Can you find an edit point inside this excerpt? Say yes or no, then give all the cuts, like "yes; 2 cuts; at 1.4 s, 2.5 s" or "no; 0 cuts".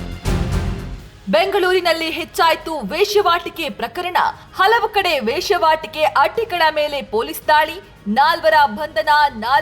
yes; 1 cut; at 1.1 s